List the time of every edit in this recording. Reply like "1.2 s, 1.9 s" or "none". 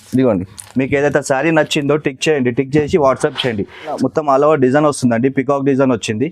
4.0 s